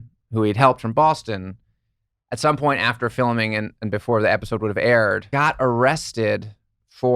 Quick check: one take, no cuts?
no; 1 cut; at 5.2 s

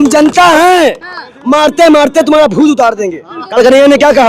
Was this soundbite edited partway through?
yes; 1 cut; at 3.3 s

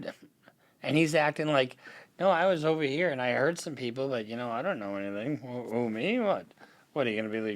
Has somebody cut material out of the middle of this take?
no; 0 cuts

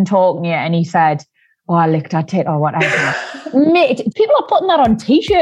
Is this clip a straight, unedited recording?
no; 1 cut; at 4.0 s

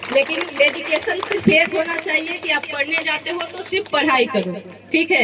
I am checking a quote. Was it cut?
no; 0 cuts

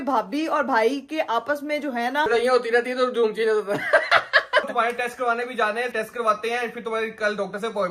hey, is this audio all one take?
no; 3 cuts; at 2.2 s, 4.7 s, 5.9 s

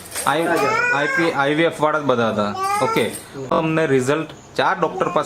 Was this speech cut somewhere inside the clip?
yes; 1 cut; at 3.5 s

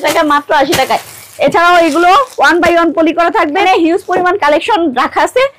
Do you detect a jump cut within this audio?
yes; 1 cut; at 3.6 s

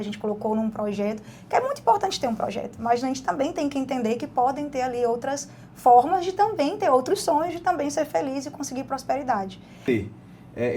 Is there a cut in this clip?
yes; 1 cut; at 9.9 s

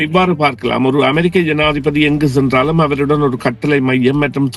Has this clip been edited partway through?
no; 0 cuts

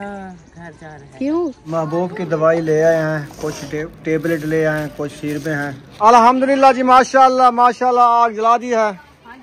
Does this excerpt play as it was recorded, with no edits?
no; 2 cuts; at 1.6 s, 5.8 s

